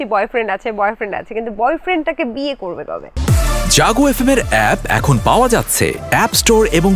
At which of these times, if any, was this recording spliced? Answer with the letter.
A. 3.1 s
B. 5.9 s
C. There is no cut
A